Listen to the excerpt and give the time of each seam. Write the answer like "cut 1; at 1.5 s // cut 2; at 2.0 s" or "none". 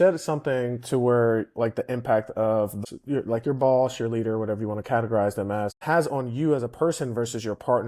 cut 1; at 2.8 s // cut 2; at 5.8 s